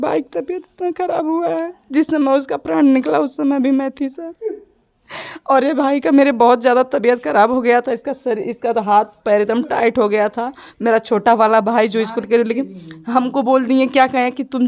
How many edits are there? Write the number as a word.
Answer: zero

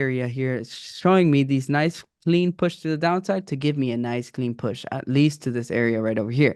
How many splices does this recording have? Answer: zero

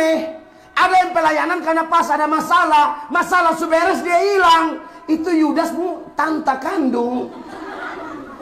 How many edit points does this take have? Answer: zero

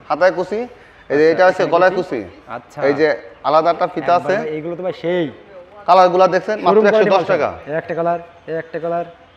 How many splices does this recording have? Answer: zero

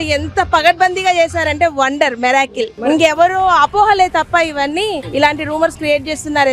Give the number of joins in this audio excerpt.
two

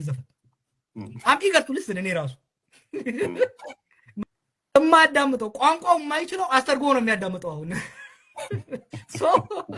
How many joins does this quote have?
one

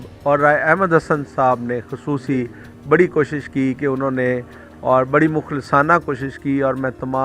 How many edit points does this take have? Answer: zero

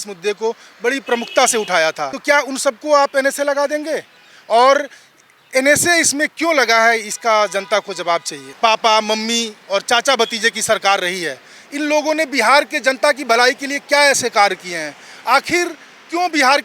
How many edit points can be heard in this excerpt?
two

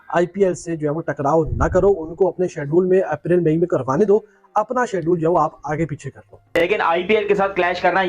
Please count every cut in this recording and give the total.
one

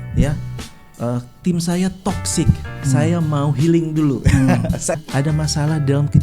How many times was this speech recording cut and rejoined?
one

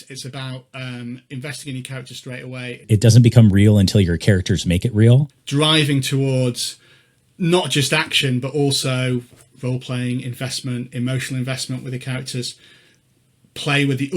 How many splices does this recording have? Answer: two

